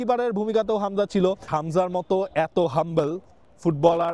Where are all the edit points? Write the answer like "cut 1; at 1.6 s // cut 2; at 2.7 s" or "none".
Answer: cut 1; at 1.5 s